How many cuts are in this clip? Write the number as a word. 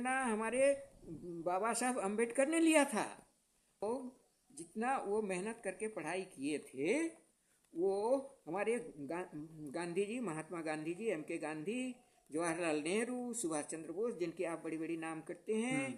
one